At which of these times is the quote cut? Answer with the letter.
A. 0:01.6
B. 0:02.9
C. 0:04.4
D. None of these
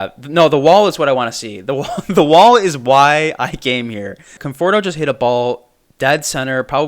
C